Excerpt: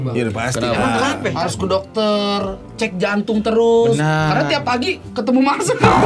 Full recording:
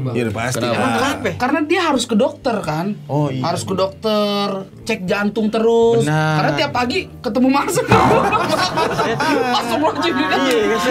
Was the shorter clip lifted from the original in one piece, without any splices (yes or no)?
no